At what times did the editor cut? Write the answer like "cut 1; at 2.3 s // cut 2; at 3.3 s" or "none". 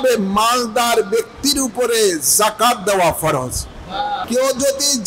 cut 1; at 4.1 s